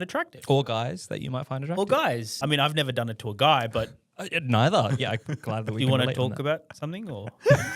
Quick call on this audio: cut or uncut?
cut